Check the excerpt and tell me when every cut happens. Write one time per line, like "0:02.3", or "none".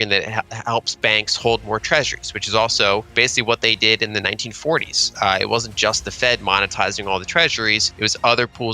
0:03.1
0:07.9